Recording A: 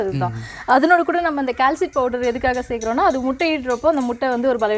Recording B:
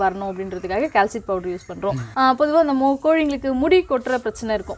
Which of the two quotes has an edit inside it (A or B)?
B